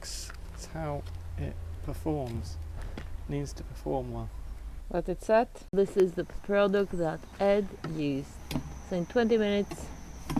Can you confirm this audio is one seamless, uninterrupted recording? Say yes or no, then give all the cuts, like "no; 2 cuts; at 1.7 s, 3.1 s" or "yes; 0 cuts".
yes; 0 cuts